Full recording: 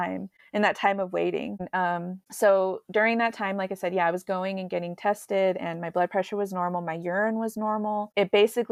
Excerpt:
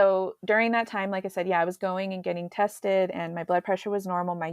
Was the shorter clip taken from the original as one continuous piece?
yes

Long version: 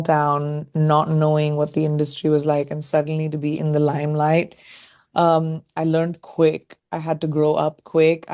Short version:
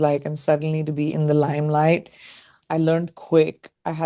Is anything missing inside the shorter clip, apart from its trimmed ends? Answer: yes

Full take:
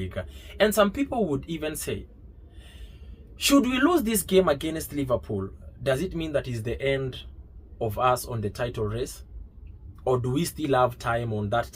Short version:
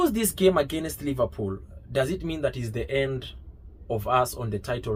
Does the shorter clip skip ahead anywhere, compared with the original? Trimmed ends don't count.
no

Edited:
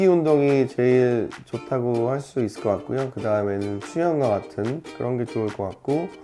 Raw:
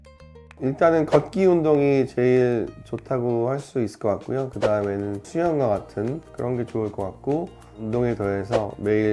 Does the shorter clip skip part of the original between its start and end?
no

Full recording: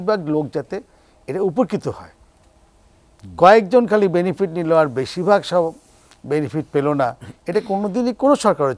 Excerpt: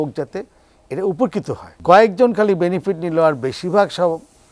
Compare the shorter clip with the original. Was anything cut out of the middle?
yes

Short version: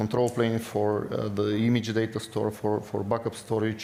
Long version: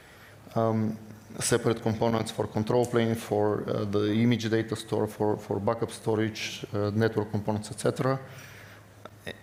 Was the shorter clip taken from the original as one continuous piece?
yes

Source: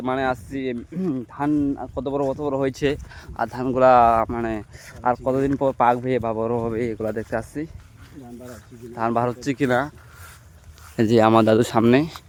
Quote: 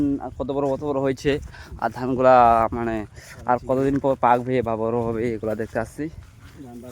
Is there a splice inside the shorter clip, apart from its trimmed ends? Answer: no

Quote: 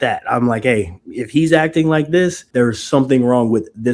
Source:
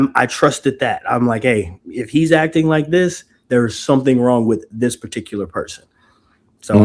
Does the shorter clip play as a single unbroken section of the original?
no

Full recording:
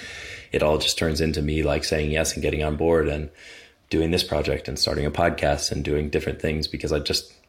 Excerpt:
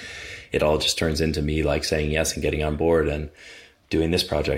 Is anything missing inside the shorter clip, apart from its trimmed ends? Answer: no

